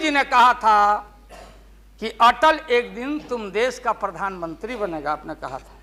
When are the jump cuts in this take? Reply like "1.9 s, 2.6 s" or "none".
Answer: none